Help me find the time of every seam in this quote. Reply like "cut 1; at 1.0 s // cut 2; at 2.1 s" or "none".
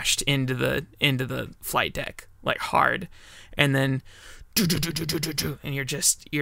none